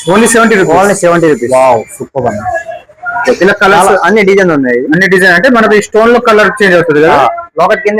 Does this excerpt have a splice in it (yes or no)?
no